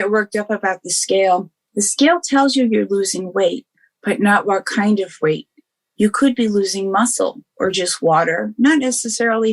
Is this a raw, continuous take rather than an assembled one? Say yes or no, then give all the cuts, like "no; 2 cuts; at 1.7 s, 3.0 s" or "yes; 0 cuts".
no; 1 cut; at 1.6 s